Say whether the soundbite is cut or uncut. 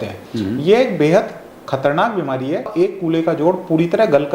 cut